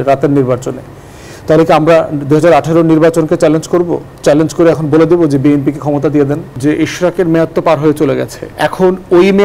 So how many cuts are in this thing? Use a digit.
1